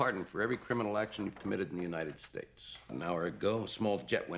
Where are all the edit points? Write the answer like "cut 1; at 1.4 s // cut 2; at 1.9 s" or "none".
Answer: cut 1; at 2.9 s

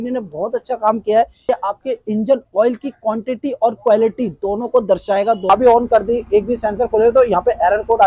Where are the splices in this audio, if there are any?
cut 1; at 1.4 s // cut 2; at 5.5 s

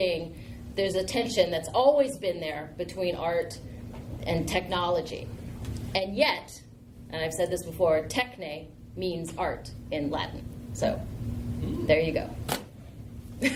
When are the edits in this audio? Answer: none

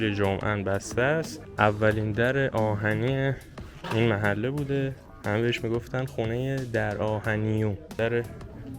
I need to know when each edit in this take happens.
cut 1; at 1.4 s // cut 2; at 5.1 s // cut 3; at 8.0 s

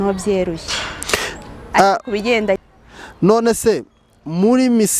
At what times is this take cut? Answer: cut 1; at 2.6 s

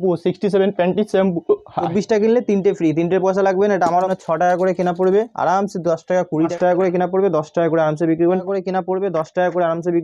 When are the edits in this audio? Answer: cut 1; at 1.9 s // cut 2; at 4.1 s // cut 3; at 6.5 s // cut 4; at 8.4 s

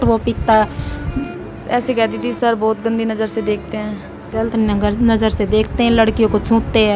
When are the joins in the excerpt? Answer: cut 1; at 1.3 s // cut 2; at 4.2 s

